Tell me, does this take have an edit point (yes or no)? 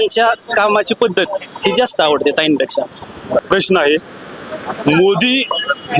yes